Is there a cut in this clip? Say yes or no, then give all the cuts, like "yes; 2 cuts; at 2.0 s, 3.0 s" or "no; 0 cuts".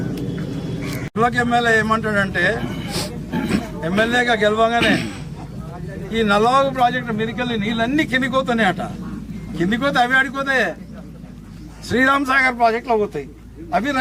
yes; 1 cut; at 1.1 s